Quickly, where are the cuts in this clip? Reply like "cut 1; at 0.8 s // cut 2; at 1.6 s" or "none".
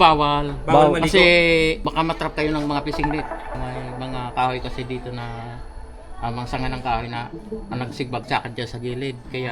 cut 1; at 1.8 s // cut 2; at 3.6 s

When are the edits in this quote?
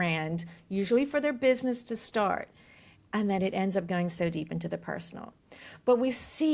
none

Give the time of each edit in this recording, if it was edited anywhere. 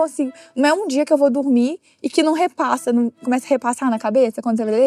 none

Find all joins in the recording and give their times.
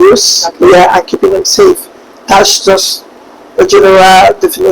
none

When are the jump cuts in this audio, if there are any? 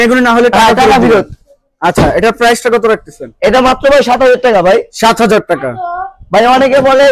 none

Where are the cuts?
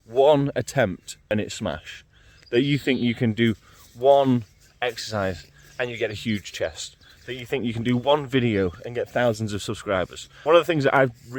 cut 1; at 1.3 s // cut 2; at 10.2 s

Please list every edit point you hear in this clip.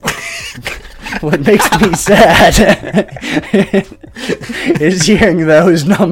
none

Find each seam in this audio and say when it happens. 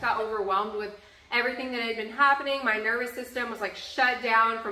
none

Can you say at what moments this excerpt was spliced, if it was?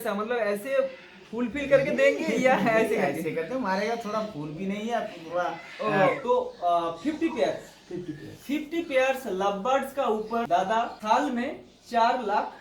cut 1; at 6.2 s // cut 2; at 10.9 s

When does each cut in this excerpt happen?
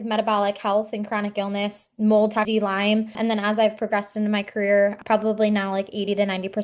cut 1; at 3.2 s // cut 2; at 5.0 s

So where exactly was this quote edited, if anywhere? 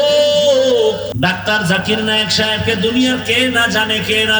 cut 1; at 1.1 s

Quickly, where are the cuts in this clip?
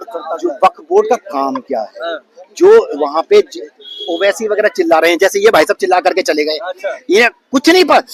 none

